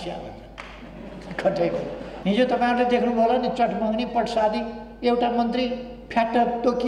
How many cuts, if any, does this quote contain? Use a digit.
1